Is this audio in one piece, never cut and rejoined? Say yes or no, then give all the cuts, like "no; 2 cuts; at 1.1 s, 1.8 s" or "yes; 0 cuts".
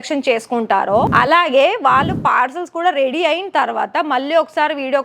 no; 1 cut; at 1.1 s